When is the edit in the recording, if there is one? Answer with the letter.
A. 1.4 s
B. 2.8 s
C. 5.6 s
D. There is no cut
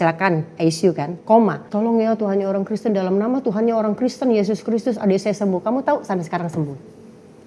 A